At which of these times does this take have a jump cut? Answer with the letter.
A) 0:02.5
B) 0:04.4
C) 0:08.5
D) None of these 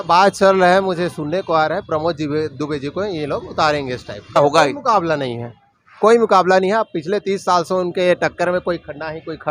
B